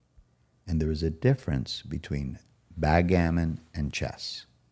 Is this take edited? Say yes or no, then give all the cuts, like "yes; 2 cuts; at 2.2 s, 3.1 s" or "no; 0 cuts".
no; 0 cuts